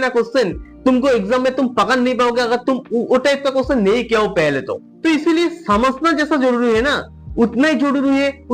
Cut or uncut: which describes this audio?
uncut